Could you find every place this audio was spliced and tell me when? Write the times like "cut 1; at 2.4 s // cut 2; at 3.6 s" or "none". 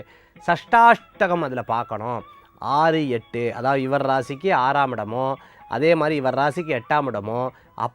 none